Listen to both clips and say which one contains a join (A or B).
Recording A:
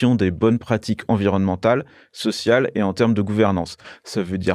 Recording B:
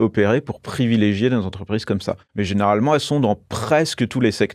B